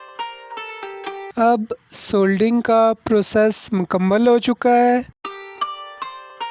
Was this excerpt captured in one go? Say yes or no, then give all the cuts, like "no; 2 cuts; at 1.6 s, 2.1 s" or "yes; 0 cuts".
yes; 0 cuts